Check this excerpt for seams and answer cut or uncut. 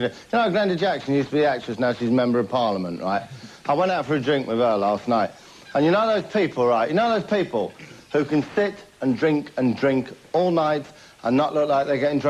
cut